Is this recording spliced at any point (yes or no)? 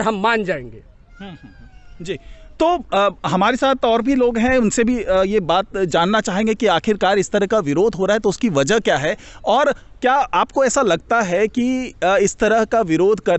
no